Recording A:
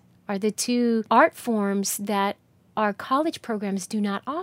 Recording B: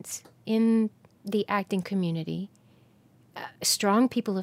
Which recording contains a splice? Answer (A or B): A